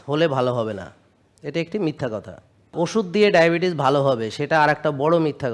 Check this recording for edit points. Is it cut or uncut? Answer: cut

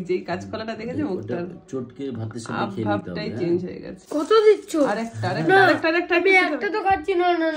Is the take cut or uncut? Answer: cut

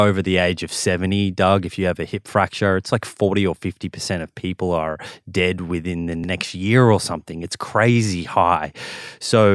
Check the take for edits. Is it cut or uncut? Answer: uncut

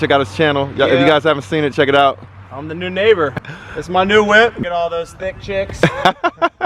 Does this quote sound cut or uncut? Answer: cut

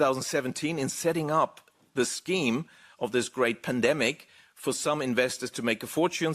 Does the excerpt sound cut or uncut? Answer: uncut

